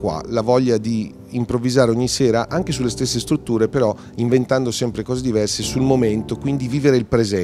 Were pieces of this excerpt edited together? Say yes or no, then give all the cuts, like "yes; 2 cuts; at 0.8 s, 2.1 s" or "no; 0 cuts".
no; 0 cuts